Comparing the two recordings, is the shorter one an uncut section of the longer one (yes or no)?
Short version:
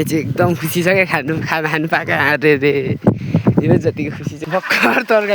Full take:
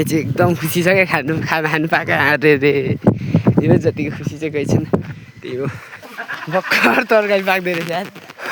no